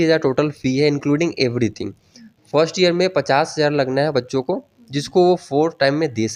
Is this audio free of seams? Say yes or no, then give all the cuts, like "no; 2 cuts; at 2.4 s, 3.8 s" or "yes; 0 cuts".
yes; 0 cuts